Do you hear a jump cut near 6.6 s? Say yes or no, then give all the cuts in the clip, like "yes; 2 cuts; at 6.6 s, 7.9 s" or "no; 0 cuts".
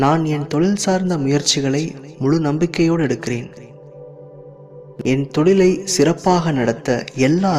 no; 2 cuts; at 3.6 s, 5.0 s